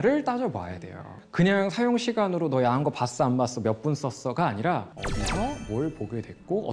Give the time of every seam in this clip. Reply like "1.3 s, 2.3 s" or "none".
1.2 s